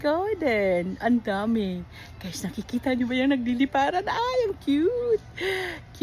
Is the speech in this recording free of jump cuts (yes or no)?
yes